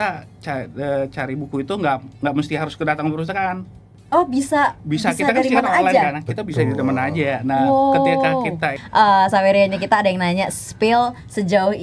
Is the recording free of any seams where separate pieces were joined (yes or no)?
no